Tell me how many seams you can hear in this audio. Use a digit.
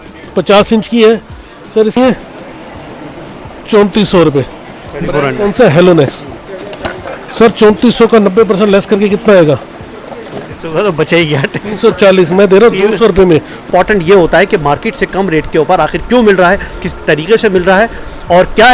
2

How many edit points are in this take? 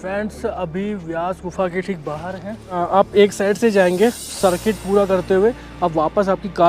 1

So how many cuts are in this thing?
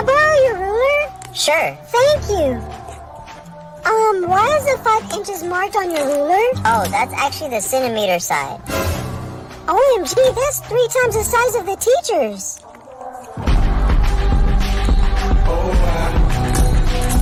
0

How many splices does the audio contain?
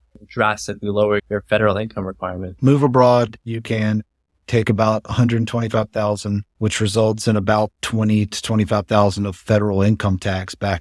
2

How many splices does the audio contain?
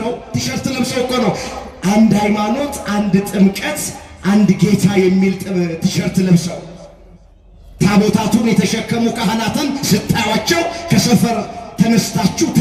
0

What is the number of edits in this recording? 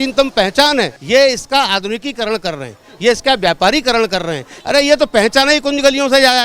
2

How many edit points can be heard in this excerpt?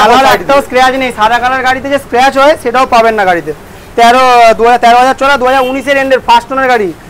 0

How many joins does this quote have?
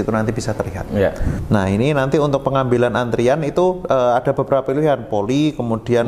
1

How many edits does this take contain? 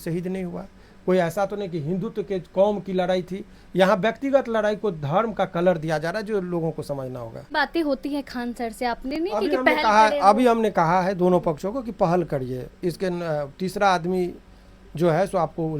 1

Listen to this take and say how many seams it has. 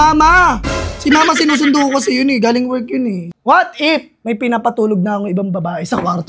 2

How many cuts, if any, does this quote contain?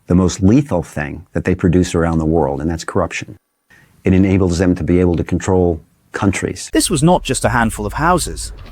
1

